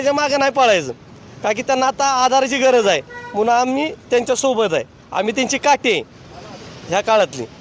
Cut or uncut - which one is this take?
uncut